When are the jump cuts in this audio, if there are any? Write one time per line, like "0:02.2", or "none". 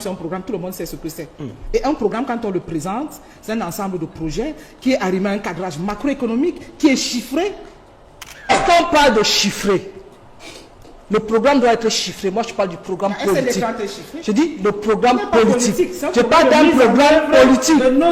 0:08.5